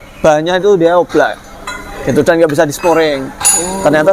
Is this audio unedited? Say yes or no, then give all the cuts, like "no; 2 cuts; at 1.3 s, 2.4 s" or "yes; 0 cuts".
yes; 0 cuts